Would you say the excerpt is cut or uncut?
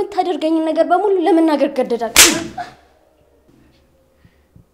uncut